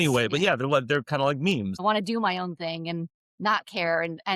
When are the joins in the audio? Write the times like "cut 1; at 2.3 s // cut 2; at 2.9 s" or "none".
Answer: cut 1; at 1.8 s